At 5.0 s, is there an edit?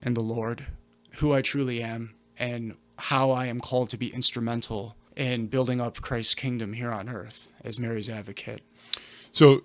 yes; 1 cut; at 5.0 s

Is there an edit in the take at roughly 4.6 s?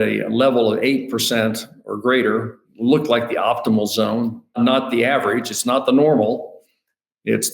yes; 2 cuts; at 2.6 s, 4.6 s

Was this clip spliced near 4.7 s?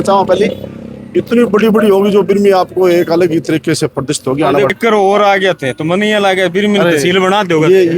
yes; 1 cut; at 4.7 s

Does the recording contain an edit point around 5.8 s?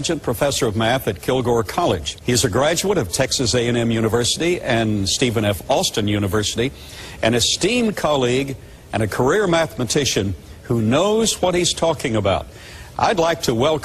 yes; 1 cut; at 5.8 s

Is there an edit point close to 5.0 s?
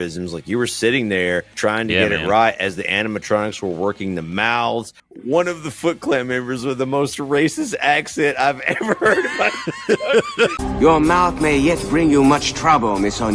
yes; 3 cuts; at 1.5 s, 5.0 s, 10.6 s

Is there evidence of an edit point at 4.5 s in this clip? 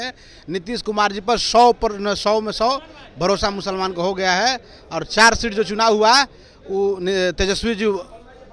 no; 0 cuts

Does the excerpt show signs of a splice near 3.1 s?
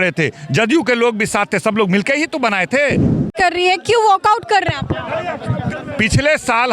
yes; 1 cut; at 3.1 s

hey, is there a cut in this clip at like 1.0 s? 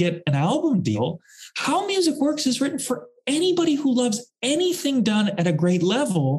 yes; 1 cut; at 1.0 s

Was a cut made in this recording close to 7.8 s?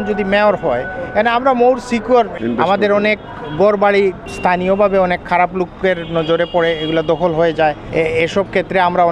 yes; 3 cuts; at 2.3 s, 4.3 s, 7.8 s

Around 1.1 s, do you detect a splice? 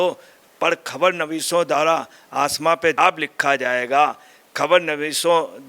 no; 1 cut; at 3.0 s

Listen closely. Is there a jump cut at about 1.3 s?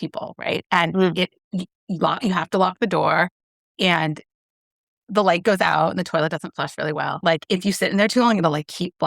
no; 1 cut; at 7.2 s

